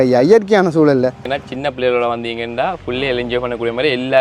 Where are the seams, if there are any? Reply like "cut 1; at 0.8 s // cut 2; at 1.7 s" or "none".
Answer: cut 1; at 1.3 s